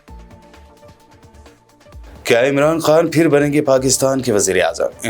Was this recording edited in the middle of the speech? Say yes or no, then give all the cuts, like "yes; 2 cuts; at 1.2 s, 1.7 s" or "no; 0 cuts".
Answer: yes; 1 cut; at 1.1 s